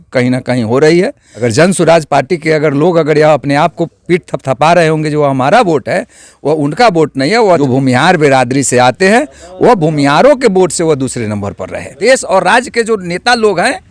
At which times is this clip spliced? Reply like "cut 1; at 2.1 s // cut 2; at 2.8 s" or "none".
cut 1; at 1.2 s // cut 2; at 7.6 s // cut 3; at 11.8 s